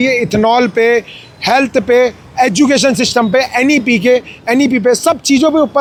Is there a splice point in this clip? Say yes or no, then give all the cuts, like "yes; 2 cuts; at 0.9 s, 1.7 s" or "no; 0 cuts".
no; 0 cuts